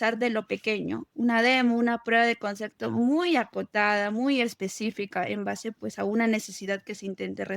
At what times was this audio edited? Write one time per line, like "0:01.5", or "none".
0:01.0